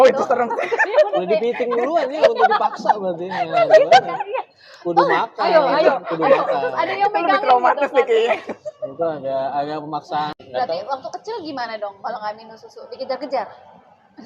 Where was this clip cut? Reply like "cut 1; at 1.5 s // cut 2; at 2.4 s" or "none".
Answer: cut 1; at 10.4 s